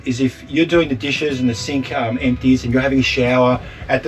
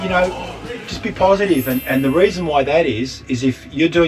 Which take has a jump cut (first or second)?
second